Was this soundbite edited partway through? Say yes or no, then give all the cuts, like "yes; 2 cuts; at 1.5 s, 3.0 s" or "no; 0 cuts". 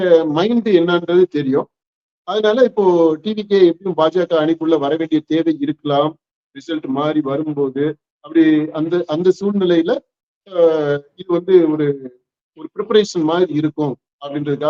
no; 0 cuts